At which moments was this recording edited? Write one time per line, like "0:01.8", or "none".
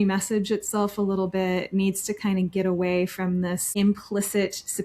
0:03.7

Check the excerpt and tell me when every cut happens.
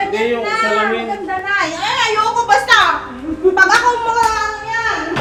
none

